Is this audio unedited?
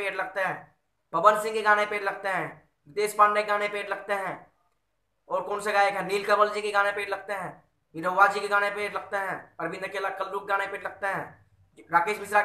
yes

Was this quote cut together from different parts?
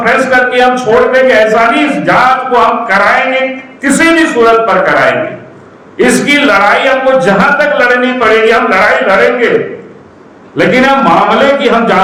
no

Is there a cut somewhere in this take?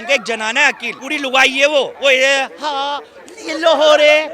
yes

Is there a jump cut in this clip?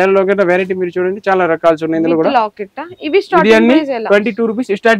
no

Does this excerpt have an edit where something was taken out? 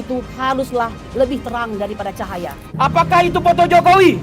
yes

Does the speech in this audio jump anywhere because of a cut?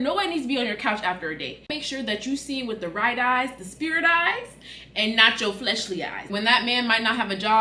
yes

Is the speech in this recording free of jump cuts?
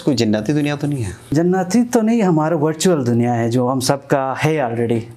no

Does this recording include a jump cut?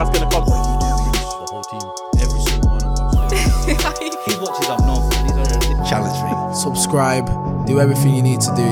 no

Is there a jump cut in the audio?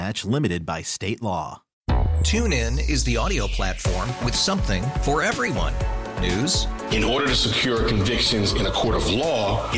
yes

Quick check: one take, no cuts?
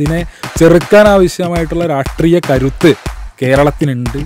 yes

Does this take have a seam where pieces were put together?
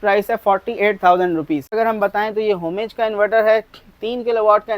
yes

